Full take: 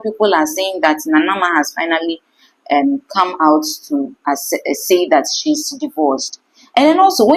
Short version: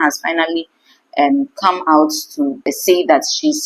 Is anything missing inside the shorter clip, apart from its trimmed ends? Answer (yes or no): yes